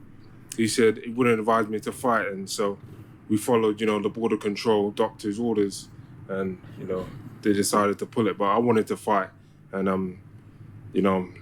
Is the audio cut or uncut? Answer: uncut